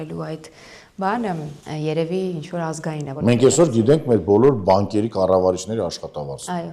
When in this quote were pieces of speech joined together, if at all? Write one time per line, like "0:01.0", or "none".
0:01.6
0:03.1